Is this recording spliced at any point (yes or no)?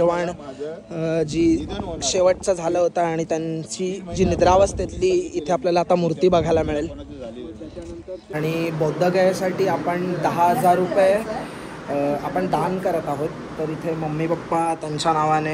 yes